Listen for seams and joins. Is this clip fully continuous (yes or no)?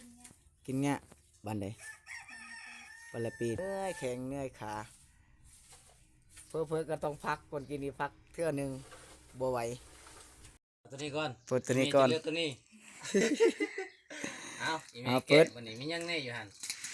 no